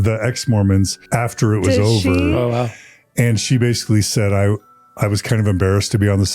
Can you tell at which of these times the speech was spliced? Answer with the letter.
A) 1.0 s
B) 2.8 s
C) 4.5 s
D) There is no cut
A